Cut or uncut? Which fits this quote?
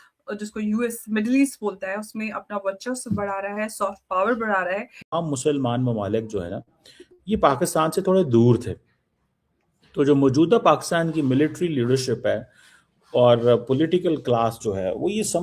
cut